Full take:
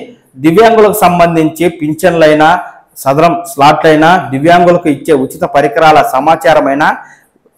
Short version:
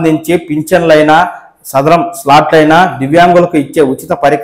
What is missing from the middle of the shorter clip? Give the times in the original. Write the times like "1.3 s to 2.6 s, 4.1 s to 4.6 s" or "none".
none